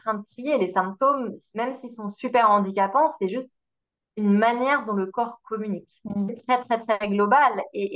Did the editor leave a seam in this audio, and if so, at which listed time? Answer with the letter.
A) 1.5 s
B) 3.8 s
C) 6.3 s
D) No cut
C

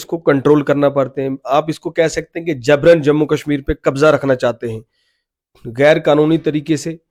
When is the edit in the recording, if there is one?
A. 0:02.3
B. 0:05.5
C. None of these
C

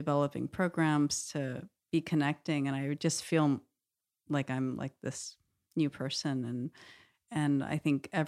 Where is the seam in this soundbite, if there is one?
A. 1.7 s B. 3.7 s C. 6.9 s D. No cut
A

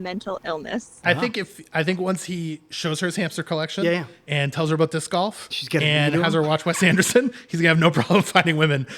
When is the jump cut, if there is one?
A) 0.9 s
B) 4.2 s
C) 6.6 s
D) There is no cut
A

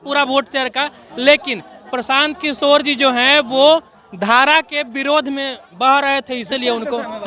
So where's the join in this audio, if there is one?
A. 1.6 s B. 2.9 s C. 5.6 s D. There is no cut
D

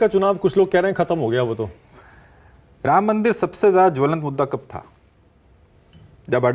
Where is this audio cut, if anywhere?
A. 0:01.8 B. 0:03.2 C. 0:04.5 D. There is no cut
A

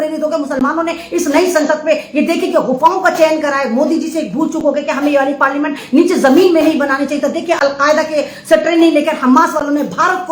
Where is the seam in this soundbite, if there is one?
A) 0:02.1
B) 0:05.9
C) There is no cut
C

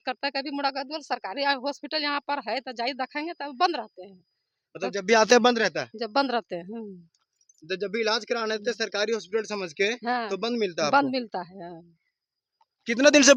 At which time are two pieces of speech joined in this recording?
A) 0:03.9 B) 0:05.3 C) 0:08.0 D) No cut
D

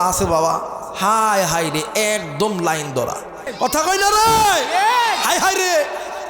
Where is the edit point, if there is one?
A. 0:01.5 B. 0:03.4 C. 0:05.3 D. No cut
B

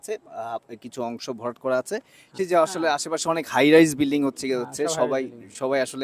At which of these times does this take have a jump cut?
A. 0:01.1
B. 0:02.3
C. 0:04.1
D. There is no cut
B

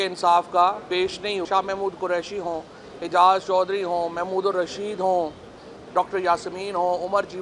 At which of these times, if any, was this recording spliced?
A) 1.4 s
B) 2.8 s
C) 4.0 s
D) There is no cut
A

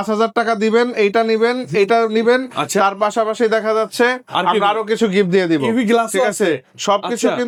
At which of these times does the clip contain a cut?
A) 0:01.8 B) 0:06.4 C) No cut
C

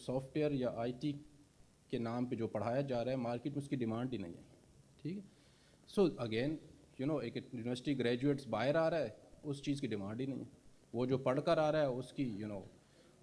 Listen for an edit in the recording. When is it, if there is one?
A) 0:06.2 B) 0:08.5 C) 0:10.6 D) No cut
D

